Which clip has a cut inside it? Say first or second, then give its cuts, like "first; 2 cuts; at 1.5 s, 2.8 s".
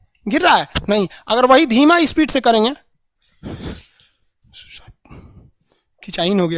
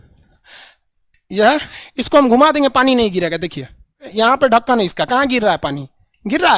second; 2 cuts; at 1.7 s, 4.0 s